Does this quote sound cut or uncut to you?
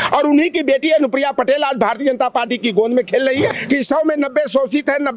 cut